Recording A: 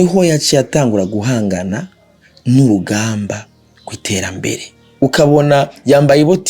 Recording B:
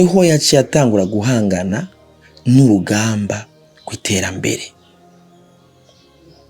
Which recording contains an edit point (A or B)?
A